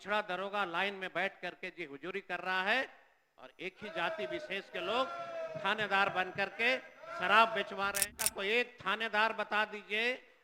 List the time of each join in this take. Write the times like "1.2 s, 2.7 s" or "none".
8.1 s